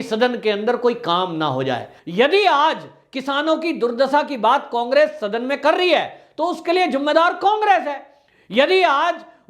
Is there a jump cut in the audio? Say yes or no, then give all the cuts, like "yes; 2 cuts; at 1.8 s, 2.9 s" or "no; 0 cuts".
yes; 1 cut; at 1.9 s